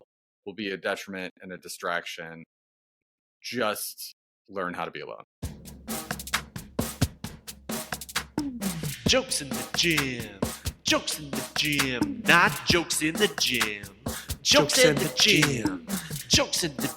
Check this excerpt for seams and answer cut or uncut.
cut